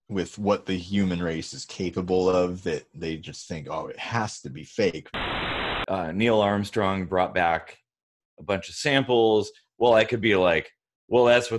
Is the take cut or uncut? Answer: cut